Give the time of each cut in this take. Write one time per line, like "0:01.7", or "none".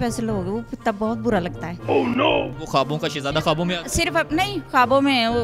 0:02.5